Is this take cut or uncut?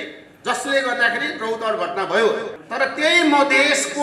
cut